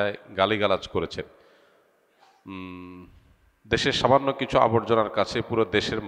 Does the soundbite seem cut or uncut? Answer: uncut